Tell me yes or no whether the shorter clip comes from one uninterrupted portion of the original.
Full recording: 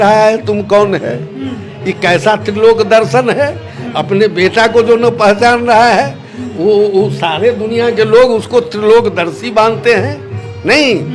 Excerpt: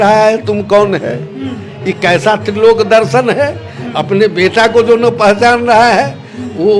yes